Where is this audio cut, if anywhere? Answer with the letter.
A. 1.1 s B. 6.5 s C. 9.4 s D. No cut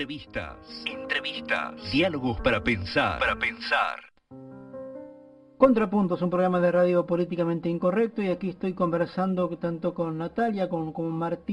D